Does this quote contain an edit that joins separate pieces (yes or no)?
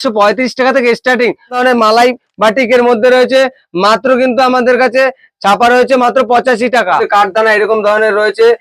yes